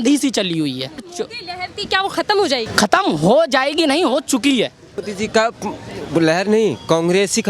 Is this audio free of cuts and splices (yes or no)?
no